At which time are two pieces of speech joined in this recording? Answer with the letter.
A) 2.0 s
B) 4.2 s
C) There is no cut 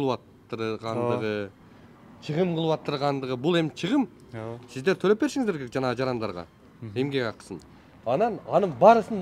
C